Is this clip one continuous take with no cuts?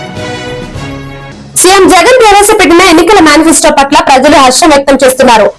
no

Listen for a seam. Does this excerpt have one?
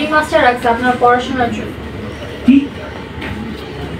no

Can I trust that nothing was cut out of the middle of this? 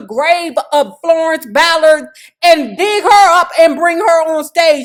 yes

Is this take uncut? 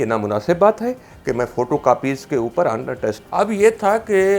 no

